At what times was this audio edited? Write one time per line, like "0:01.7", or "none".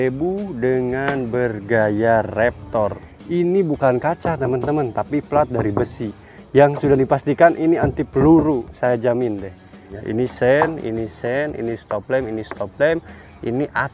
0:03.1
0:09.9